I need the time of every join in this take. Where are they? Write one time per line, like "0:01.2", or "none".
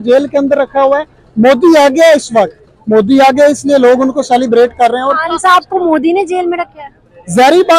none